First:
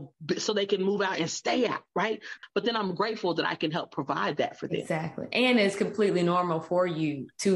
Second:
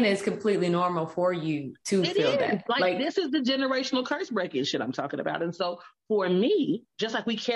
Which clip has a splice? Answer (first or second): first